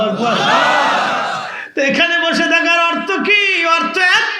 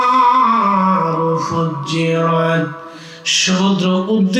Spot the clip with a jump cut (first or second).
first